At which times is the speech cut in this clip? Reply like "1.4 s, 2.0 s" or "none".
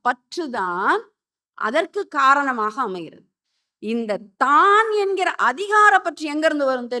none